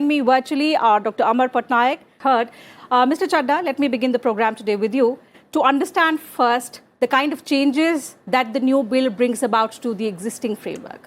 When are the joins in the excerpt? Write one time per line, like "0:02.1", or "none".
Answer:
0:02.1